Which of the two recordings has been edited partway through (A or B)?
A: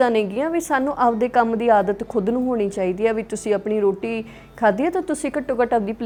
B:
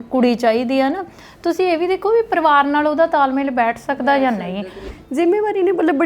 B